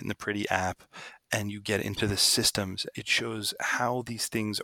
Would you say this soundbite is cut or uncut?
cut